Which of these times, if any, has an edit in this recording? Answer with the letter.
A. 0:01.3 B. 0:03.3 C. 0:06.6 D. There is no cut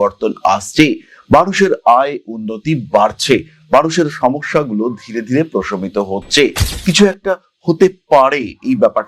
C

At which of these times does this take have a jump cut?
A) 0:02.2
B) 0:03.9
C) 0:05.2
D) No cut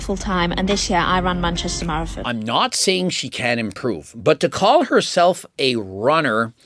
A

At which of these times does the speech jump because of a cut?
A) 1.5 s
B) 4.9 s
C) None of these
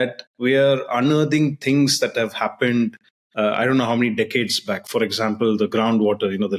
C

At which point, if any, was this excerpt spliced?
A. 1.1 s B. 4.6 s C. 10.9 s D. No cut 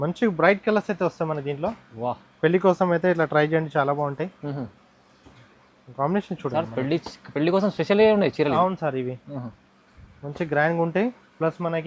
D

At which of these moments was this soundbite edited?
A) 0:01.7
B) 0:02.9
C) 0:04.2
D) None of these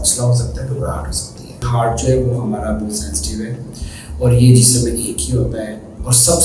A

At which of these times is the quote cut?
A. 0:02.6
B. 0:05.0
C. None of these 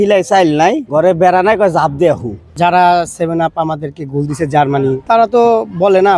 A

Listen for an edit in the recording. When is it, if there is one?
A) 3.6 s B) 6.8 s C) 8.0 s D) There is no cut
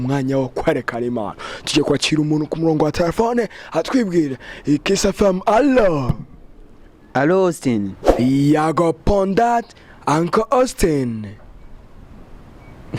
C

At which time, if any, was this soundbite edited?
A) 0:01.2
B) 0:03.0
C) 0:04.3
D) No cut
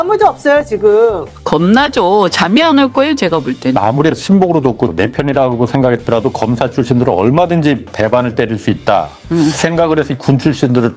A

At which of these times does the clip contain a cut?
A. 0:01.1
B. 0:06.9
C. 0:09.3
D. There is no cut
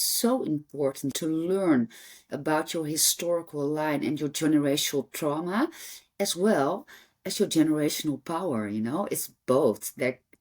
A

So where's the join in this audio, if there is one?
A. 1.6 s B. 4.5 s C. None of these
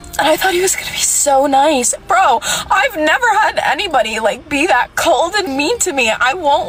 C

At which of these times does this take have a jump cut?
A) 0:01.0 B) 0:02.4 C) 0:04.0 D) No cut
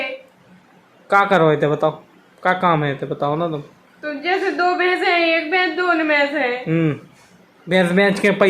D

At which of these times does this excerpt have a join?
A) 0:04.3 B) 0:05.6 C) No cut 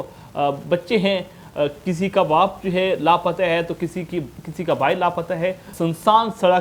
B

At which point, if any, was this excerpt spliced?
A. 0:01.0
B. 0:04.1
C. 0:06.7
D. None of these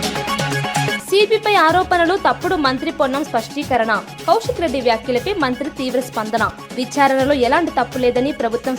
A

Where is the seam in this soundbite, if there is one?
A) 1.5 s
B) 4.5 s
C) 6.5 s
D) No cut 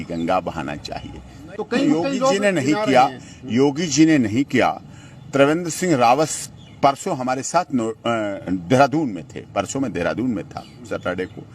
A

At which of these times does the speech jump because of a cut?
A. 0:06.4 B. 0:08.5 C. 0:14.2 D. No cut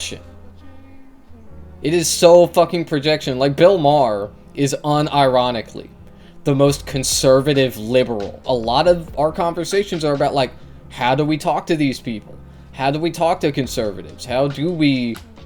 B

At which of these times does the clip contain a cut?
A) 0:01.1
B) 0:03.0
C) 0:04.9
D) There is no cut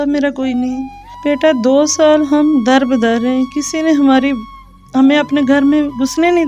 D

